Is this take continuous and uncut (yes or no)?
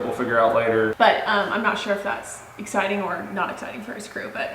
no